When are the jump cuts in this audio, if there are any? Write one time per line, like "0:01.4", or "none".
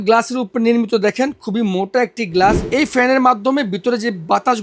0:02.7